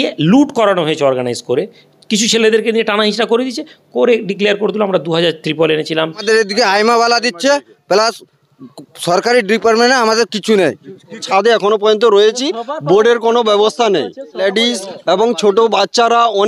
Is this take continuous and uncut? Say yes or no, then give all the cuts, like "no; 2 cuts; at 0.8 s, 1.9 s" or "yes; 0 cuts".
no; 3 cuts; at 6.2 s, 11.3 s, 14.4 s